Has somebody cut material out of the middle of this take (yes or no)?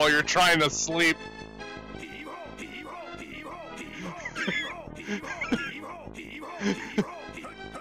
no